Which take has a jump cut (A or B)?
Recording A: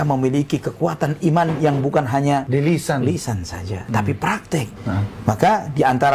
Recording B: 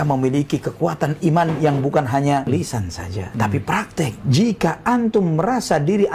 B